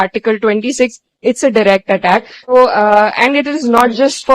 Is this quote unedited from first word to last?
no; 1 cut; at 2.5 s

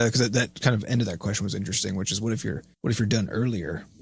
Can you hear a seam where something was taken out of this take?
yes; 1 cut; at 2.7 s

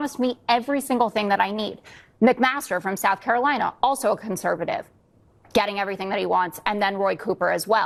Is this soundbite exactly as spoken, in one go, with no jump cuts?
yes; 0 cuts

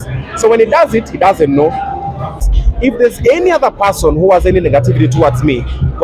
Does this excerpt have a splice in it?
yes; 1 cut; at 2.4 s

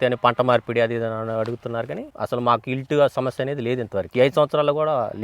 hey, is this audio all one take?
no; 1 cut; at 2.0 s

